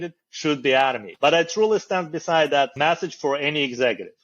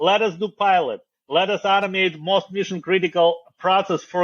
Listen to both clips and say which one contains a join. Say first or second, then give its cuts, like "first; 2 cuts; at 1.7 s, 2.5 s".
first; 2 cuts; at 1.1 s, 2.7 s